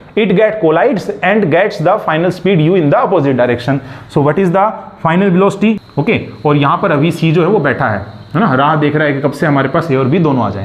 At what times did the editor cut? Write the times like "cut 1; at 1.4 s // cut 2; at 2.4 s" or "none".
cut 1; at 5.8 s